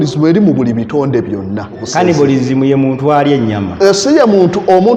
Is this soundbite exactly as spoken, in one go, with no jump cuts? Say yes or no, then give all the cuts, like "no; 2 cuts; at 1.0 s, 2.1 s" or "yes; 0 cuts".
no; 1 cut; at 1.9 s